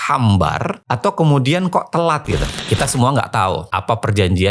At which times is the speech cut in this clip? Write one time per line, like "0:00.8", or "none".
0:02.6